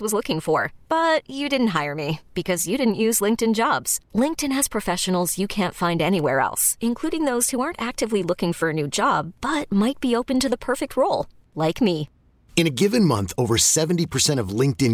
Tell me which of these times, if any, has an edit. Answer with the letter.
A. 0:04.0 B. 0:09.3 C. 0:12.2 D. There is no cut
D